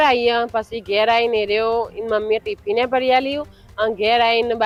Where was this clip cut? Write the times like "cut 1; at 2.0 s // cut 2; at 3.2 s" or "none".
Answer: none